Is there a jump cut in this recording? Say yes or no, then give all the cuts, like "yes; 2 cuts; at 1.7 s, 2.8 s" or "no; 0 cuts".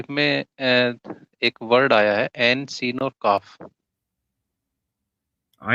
no; 0 cuts